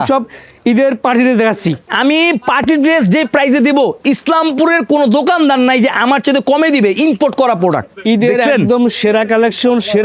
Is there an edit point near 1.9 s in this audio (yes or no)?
yes